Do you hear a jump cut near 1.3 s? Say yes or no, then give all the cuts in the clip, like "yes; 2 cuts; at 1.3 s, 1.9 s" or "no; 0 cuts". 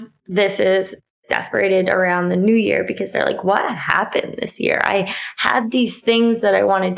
yes; 1 cut; at 1.3 s